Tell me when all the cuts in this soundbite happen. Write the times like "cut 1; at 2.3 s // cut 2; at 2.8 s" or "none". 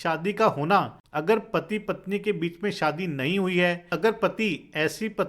cut 1; at 1.0 s // cut 2; at 3.9 s